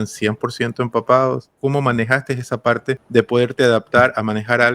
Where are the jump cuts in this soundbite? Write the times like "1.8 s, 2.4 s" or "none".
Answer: 1.5 s, 3.0 s